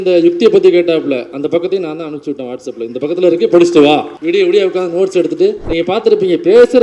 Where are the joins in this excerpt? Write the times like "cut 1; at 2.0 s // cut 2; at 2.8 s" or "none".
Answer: cut 1; at 4.1 s // cut 2; at 5.6 s